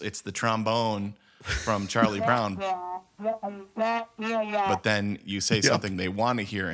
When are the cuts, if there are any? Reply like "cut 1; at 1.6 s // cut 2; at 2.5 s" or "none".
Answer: cut 1; at 2.5 s // cut 2; at 4.8 s